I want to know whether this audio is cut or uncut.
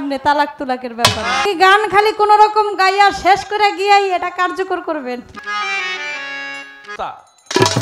cut